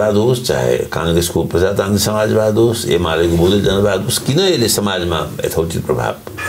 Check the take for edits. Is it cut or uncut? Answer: uncut